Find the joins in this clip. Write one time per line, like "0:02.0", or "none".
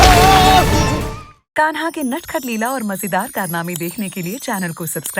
0:01.0